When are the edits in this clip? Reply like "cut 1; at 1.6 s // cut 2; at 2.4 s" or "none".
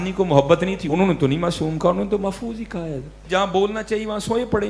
cut 1; at 0.8 s // cut 2; at 3.2 s

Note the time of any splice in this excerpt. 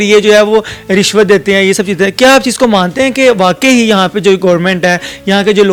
none

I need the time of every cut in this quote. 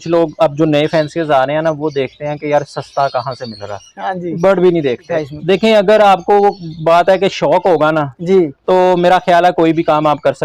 cut 1; at 5.1 s

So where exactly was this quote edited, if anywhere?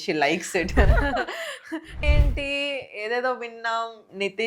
cut 1; at 2.0 s

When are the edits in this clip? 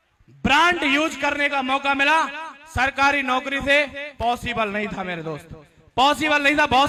none

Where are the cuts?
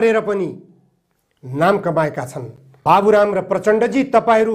cut 1; at 2.6 s

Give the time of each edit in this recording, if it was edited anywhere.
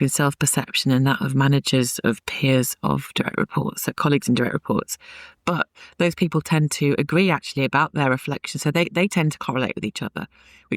none

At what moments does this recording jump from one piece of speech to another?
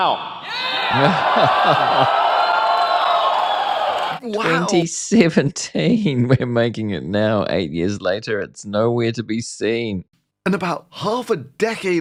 none

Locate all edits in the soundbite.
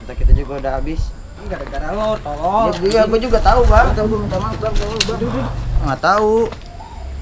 cut 1; at 1.4 s // cut 2; at 4.0 s // cut 3; at 5.9 s

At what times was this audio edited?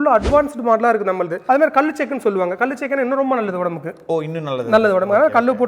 cut 1; at 1.3 s

